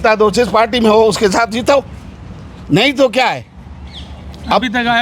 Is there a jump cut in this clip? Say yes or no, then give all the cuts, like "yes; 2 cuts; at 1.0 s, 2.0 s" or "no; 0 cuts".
no; 0 cuts